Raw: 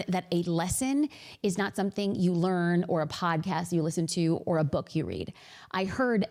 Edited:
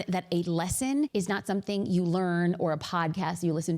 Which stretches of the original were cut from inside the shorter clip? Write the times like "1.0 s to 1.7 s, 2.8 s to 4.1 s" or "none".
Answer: 1.1 s to 1.4 s

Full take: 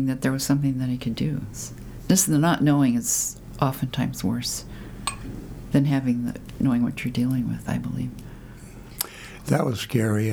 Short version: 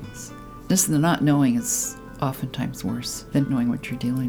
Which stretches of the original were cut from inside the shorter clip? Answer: 4.7 s to 6.5 s

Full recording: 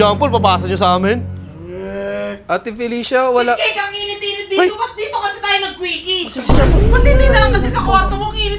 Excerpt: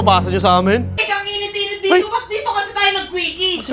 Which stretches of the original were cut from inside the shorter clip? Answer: 1.4 s to 3.7 s

